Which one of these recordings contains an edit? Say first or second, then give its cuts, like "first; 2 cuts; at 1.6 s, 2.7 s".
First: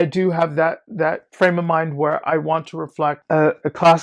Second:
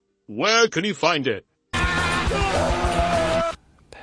second; 1 cut; at 1.8 s